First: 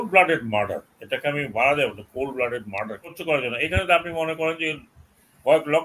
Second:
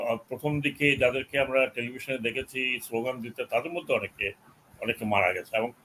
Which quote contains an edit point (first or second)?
first